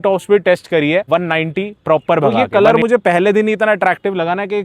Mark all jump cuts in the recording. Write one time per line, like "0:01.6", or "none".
0:01.1
0:02.4

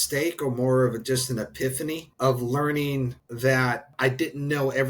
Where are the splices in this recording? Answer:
0:02.1
0:03.2
0:03.9

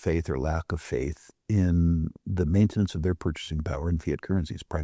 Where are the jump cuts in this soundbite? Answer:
none

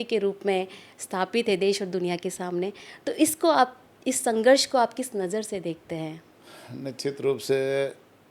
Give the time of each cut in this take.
none

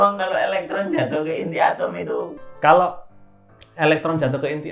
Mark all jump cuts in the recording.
0:02.4

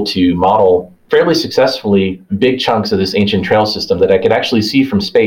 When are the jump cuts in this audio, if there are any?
0:01.0

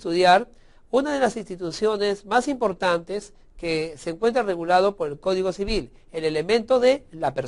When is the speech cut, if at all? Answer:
0:04.8

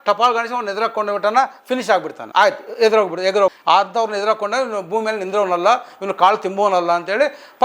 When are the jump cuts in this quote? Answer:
0:02.2
0:03.6

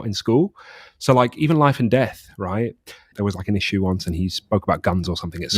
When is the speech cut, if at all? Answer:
0:03.1

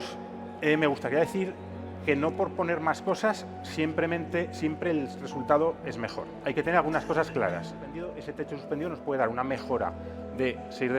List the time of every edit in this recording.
0:08.2

